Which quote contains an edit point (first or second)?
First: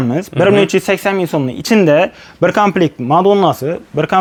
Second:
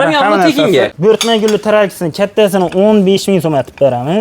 second